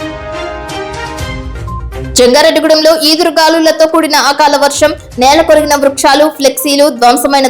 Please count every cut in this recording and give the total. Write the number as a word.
two